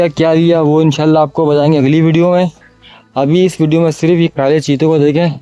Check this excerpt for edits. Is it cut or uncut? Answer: uncut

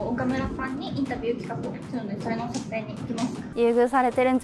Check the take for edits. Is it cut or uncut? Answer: cut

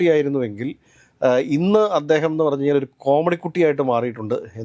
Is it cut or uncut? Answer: uncut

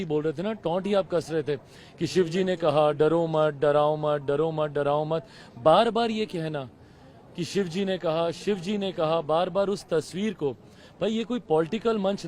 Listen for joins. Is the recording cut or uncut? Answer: uncut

